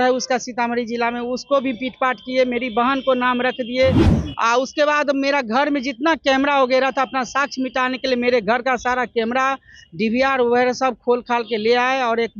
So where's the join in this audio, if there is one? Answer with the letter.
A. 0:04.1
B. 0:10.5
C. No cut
A